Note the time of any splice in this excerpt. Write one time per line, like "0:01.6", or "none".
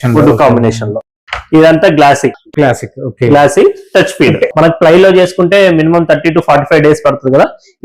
0:04.5